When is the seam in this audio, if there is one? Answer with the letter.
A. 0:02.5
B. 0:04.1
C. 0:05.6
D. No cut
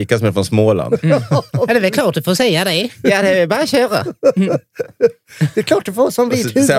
D